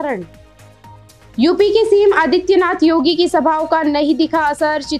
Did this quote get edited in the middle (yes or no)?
no